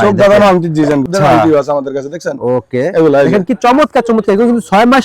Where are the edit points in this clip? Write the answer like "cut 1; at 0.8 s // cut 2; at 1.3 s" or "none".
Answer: cut 1; at 1.1 s